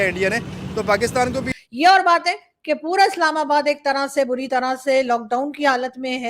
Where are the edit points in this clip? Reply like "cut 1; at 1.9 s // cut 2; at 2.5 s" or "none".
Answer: cut 1; at 1.5 s